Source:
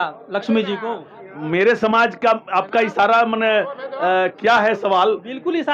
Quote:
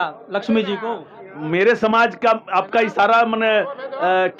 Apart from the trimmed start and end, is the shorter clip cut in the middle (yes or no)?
no